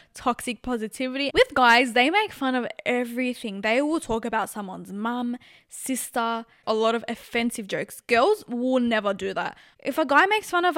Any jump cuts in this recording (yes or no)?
yes